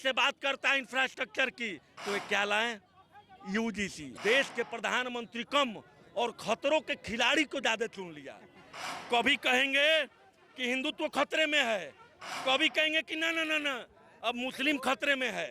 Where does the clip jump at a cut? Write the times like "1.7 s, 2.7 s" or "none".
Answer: 4.0 s